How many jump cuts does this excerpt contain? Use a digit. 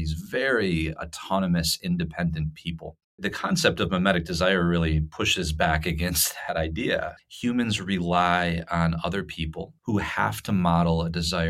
3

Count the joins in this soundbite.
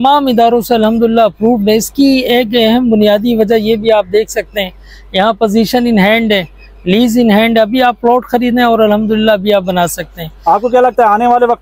0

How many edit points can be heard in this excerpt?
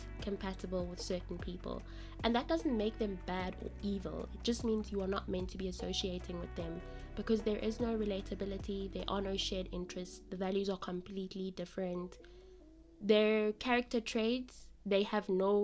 0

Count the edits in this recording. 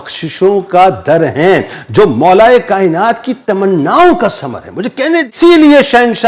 1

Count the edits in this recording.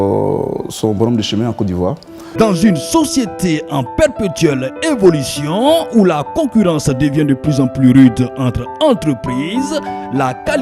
1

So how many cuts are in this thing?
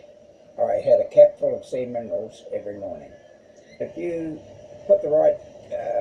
1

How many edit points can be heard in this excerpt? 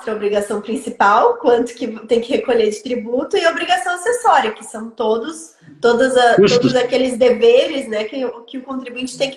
0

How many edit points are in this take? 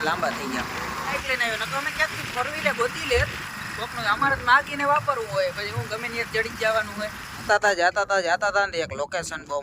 2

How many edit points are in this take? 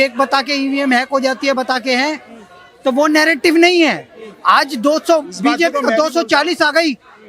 0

